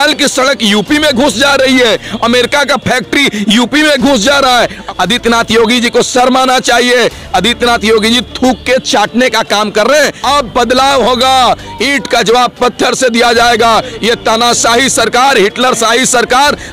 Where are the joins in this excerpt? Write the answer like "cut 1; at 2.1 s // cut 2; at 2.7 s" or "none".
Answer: cut 1; at 4.9 s // cut 2; at 10.2 s